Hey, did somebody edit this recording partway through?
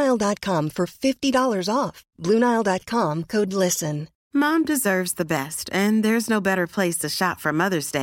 yes; 1 cut; at 4.1 s

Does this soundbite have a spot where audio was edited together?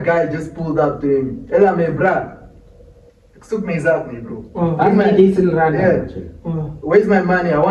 no; 0 cuts

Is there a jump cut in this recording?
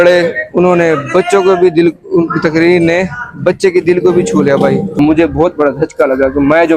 yes; 1 cut; at 4.9 s

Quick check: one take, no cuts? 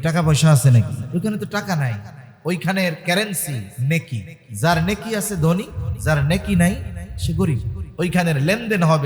no; 2 cuts; at 1.0 s, 3.7 s

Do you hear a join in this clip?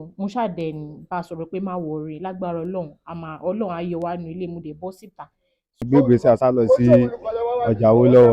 yes; 1 cut; at 5.8 s

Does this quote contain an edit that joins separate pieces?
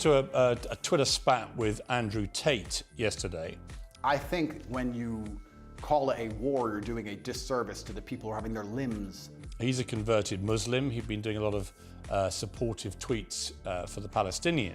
yes; 2 cuts; at 3.9 s, 9.4 s

